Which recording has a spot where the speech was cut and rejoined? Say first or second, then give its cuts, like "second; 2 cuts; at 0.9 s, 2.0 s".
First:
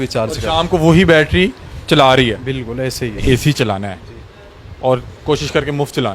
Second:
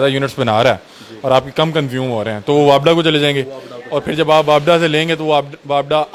first; 1 cut; at 3.2 s